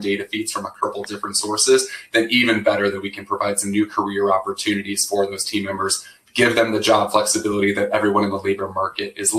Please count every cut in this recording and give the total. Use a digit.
0